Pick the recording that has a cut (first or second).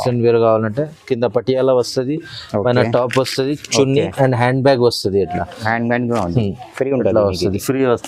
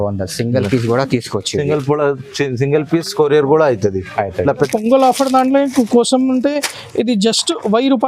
second